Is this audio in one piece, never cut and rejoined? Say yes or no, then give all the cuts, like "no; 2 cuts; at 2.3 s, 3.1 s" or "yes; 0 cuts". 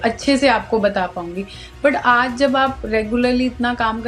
yes; 0 cuts